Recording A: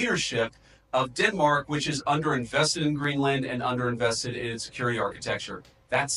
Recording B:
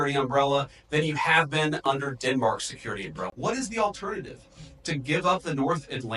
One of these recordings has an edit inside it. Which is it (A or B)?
B